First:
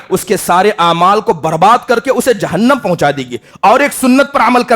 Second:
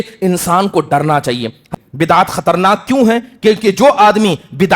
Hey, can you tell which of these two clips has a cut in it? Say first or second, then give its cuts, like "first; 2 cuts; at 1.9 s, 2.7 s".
second; 1 cut; at 1.7 s